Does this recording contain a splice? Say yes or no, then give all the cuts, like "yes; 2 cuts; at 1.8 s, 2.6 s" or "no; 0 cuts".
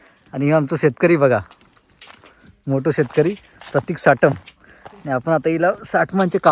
no; 0 cuts